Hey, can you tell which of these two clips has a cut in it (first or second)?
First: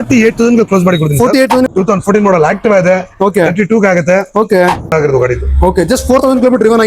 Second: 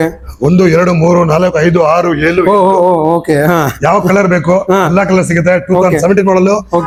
first